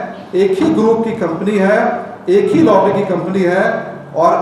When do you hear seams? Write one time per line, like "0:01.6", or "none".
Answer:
none

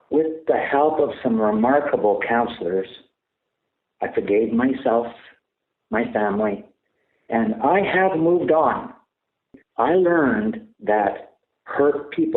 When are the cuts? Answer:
0:09.6

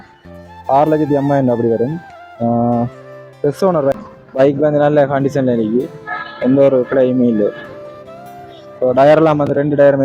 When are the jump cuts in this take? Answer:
0:04.1

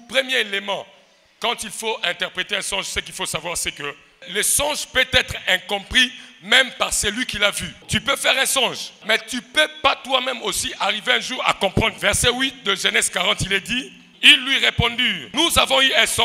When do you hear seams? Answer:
0:04.3
0:07.8
0:09.0
0:12.0
0:14.1
0:15.2

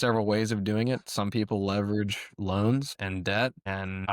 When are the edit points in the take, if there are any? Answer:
0:03.0

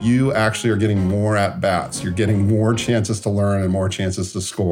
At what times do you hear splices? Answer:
none

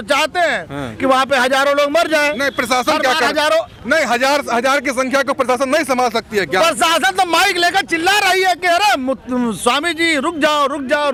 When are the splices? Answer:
none

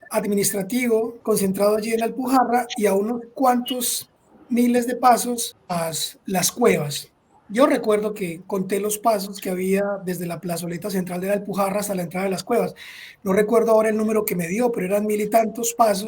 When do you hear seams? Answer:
0:01.2
0:05.5

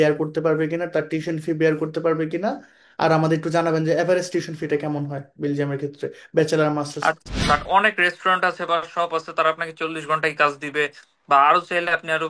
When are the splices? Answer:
0:07.3

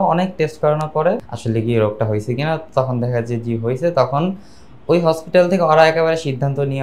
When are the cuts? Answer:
0:01.2

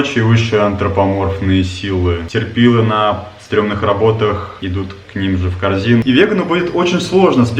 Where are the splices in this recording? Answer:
0:02.2
0:04.5
0:06.0

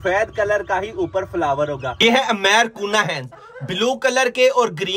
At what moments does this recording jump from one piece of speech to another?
0:02.0

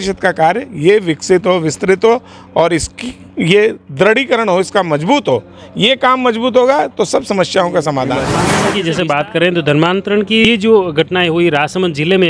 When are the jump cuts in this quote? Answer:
0:08.3
0:10.5

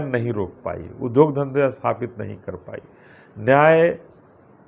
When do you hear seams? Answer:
none

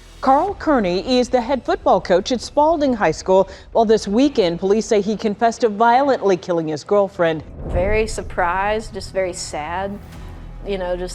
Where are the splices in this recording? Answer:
0:07.6

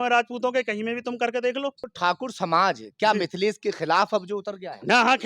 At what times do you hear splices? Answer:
0:01.9

